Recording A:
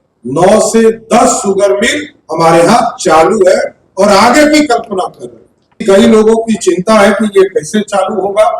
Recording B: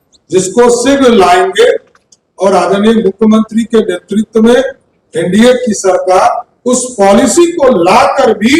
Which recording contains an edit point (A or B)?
A